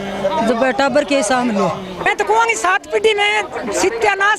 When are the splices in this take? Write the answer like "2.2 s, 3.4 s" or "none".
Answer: 2.1 s